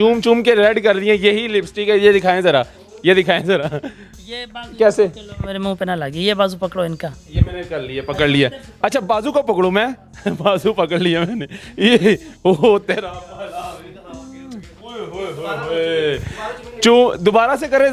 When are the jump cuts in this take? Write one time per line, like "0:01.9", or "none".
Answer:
none